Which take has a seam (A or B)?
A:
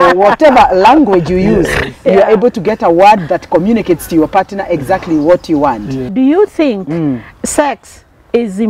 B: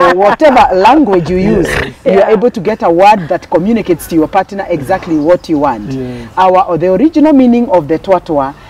A